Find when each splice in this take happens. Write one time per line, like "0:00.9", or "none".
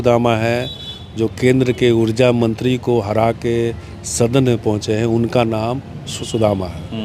none